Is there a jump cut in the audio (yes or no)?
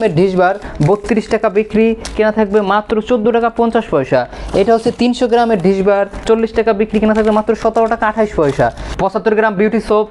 yes